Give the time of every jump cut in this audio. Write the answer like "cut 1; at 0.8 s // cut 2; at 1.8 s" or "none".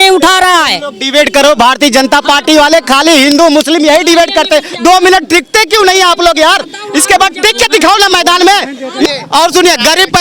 cut 1; at 9.1 s